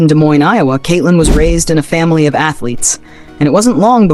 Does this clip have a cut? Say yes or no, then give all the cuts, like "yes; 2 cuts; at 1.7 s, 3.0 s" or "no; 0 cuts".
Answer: no; 0 cuts